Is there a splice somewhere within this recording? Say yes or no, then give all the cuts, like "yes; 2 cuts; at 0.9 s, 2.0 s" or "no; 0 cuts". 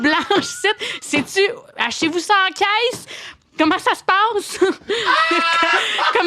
yes; 1 cut; at 4.8 s